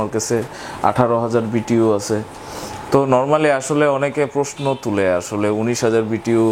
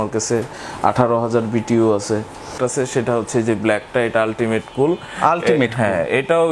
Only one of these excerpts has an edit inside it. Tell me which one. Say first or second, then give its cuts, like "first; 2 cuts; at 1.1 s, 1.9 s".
second; 1 cut; at 2.5 s